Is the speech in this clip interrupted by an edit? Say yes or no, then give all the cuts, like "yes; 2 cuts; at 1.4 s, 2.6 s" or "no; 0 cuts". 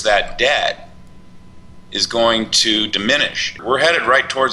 yes; 1 cut; at 3.6 s